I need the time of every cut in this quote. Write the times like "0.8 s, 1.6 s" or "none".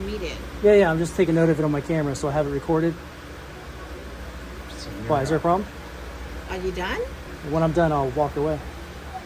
7.3 s